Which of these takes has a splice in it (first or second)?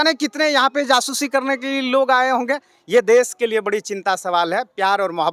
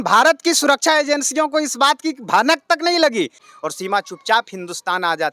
second